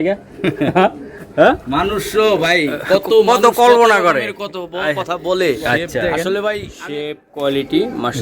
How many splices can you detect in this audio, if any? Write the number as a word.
one